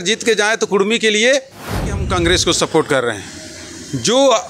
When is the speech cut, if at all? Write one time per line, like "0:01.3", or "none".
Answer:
0:02.0